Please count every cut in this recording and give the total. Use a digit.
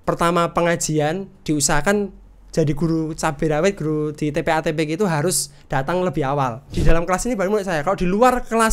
1